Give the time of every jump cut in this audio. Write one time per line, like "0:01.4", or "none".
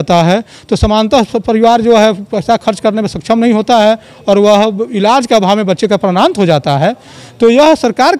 none